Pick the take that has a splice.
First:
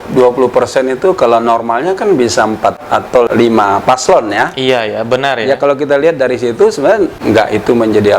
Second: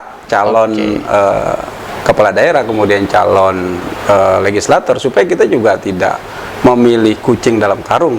first; 2 cuts; at 2.8 s, 7.2 s

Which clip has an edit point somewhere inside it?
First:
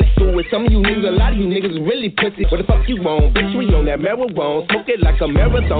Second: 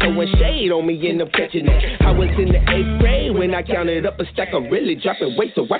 first; 1 cut; at 2.4 s

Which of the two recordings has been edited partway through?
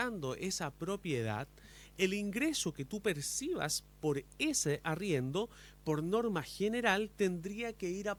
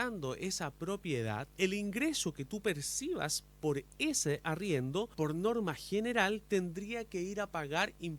second; 2 cuts; at 1.5 s, 5.1 s

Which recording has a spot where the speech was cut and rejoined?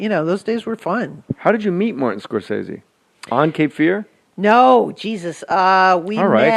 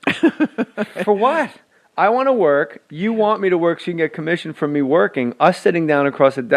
first; 1 cut; at 3.7 s

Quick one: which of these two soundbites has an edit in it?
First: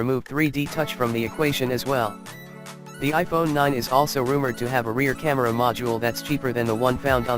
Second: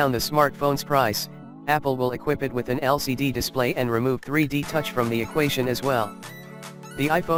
first; 1 cut; at 6.2 s

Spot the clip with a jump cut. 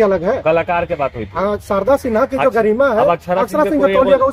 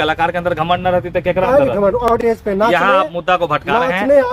second; 1 cut; at 2.1 s

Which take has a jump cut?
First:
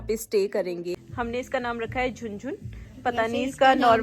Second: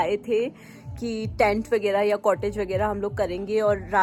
first; 1 cut; at 1.0 s

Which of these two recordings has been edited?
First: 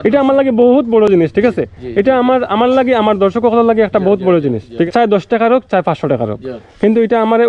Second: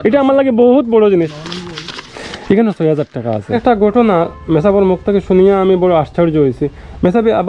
second; 2 cuts; at 1.1 s, 3.4 s

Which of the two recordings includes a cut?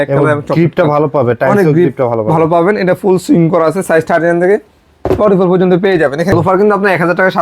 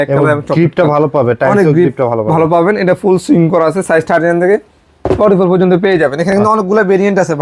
first; 1 cut; at 6.3 s

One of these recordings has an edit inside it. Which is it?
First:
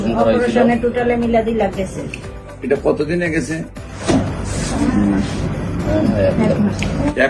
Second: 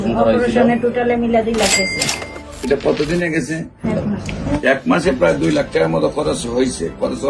second; 1 cut; at 3.8 s

